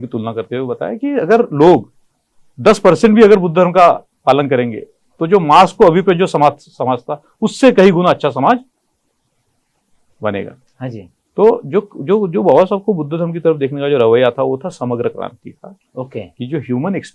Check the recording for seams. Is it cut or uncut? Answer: uncut